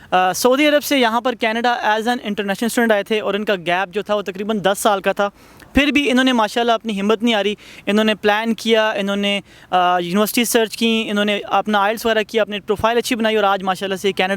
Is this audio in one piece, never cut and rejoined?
yes; 0 cuts

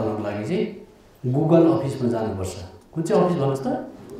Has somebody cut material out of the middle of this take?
no; 0 cuts

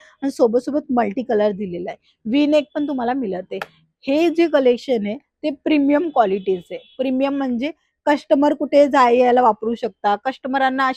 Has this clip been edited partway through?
no; 0 cuts

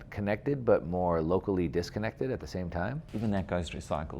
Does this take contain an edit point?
yes; 1 cut; at 3.0 s

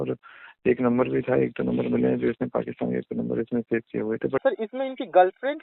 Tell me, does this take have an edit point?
yes; 1 cut; at 4.4 s

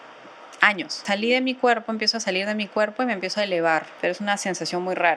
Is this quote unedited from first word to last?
no; 2 cuts; at 1.0 s, 3.9 s

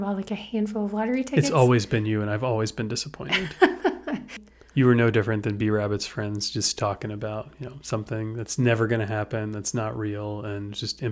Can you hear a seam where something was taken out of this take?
yes; 1 cut; at 4.4 s

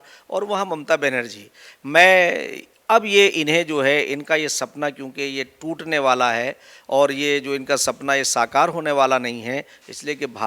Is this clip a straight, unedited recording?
yes; 0 cuts

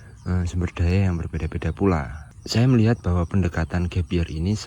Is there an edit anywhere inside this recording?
yes; 1 cut; at 2.3 s

